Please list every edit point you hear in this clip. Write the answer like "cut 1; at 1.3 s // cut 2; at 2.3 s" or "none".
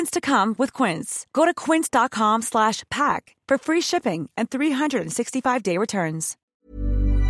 cut 1; at 6.4 s